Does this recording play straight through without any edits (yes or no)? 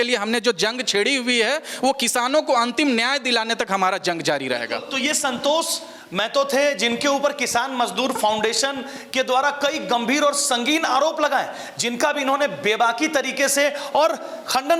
yes